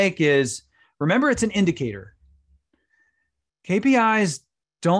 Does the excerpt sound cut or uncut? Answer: uncut